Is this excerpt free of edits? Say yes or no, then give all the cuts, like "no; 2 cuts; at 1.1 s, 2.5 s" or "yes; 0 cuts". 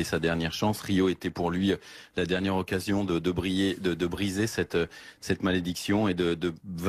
no; 1 cut; at 2.9 s